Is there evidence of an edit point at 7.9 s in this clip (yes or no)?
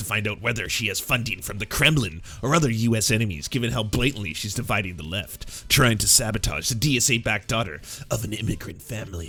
no